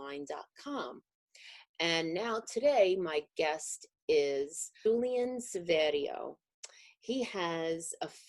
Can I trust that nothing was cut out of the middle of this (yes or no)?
no